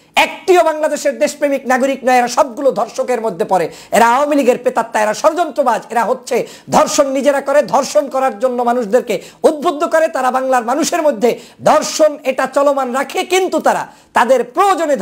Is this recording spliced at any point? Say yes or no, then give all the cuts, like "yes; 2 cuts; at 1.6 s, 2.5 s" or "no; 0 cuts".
no; 0 cuts